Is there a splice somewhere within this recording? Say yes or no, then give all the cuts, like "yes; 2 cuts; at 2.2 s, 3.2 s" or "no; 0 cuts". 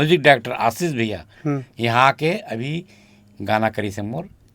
no; 0 cuts